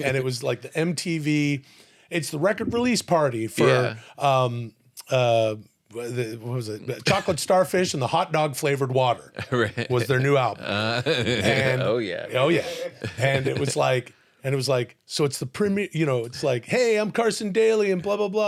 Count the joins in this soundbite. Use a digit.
0